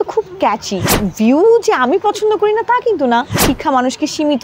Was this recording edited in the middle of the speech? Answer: yes; 2 cuts; at 0.9 s, 3.4 s

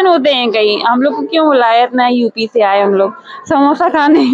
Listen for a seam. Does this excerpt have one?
no; 0 cuts

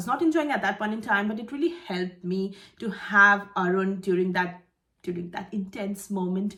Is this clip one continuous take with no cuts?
yes; 0 cuts

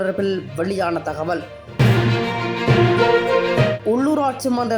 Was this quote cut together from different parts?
no; 0 cuts

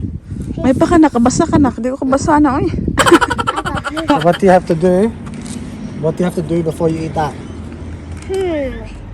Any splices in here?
yes; 1 cut; at 3.8 s

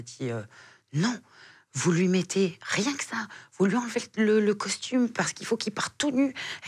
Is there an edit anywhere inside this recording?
no; 0 cuts

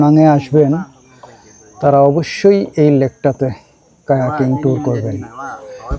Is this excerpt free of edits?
yes; 0 cuts

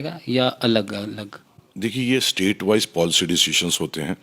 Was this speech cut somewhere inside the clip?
no; 0 cuts

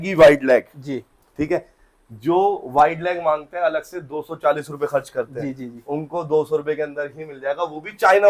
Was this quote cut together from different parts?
no; 0 cuts

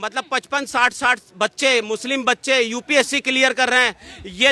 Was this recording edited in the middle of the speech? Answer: no; 0 cuts

